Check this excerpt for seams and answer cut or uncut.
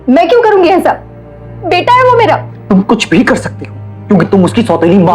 cut